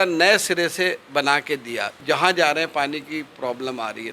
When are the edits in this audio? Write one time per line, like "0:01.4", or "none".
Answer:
0:02.0